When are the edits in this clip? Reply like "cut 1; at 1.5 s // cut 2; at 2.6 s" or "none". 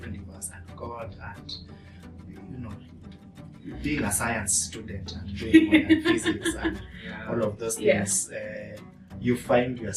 none

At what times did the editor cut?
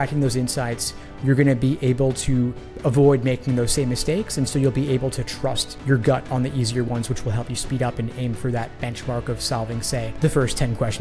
cut 1; at 10.1 s

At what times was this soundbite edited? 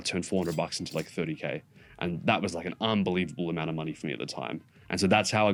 none

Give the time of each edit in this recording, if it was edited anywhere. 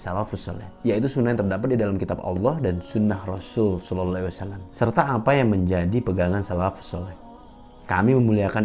none

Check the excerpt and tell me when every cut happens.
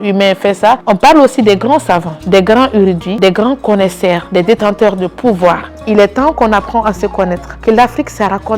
cut 1; at 0.8 s // cut 2; at 2.1 s // cut 3; at 3.1 s // cut 4; at 4.2 s // cut 5; at 5.7 s // cut 6; at 7.5 s

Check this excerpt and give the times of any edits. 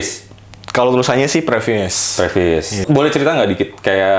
cut 1; at 2.7 s

